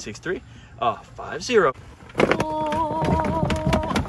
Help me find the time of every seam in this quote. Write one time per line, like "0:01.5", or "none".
0:01.8